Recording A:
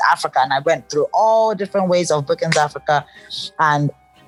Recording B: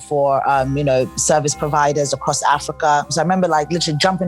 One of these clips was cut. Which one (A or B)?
B